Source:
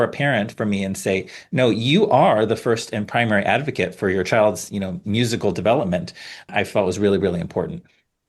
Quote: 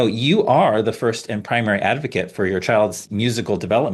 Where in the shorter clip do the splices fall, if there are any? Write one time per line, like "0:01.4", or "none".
0:03.0